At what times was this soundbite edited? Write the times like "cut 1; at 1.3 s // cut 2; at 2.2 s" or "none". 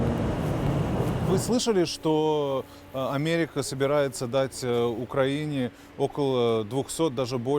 cut 1; at 1.2 s